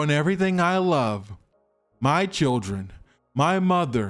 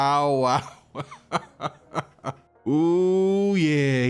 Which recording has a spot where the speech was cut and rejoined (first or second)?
second